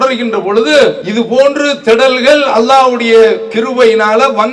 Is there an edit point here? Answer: yes; 1 cut; at 1.0 s

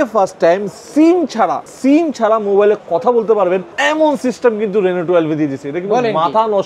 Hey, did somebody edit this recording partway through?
yes; 2 cuts; at 1.7 s, 3.7 s

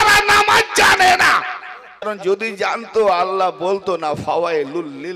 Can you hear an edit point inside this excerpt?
yes; 1 cut; at 2.1 s

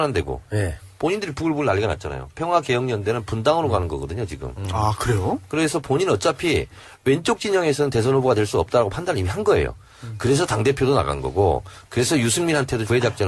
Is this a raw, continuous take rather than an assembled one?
no; 1 cut; at 12.3 s

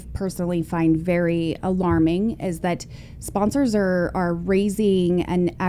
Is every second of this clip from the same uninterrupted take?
yes; 0 cuts

